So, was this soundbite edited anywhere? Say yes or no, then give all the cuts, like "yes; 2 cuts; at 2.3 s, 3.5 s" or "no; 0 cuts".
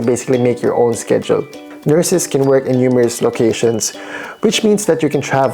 yes; 1 cut; at 1.8 s